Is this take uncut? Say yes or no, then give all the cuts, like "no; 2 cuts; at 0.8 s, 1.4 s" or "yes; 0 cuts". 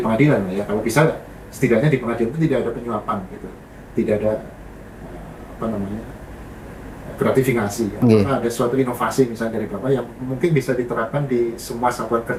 yes; 0 cuts